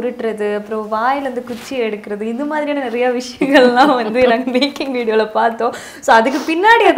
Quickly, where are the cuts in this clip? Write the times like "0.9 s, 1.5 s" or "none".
none